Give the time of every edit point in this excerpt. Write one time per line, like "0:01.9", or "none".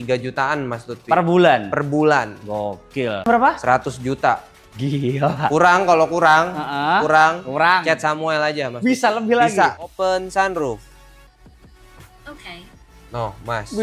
0:03.3
0:09.8